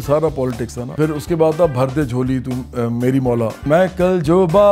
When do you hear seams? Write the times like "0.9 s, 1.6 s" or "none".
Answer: 0.9 s, 3.6 s